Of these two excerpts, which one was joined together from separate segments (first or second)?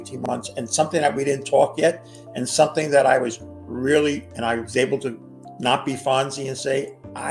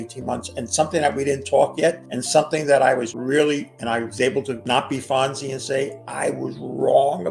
second